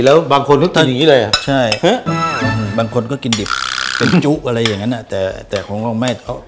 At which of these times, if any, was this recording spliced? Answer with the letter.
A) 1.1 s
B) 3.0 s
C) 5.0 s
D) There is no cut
D